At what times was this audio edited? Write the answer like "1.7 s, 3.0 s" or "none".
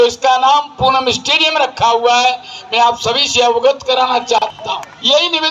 4.4 s

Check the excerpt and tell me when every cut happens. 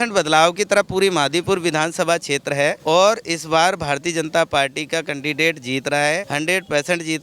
2.8 s, 6.3 s

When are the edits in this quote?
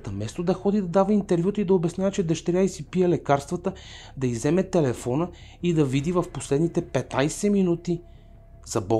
none

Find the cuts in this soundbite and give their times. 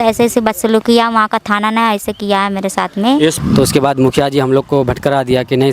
3.4 s

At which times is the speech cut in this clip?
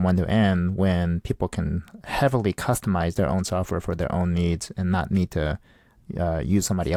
none

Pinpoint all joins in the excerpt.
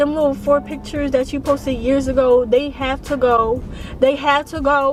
none

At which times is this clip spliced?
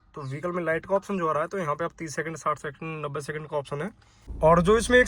4.1 s

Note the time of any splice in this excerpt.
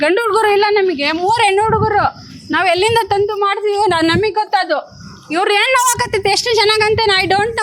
none

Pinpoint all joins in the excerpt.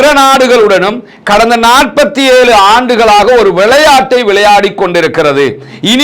none

